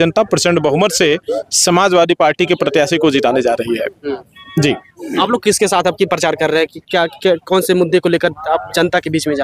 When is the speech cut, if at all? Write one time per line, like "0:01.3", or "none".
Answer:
none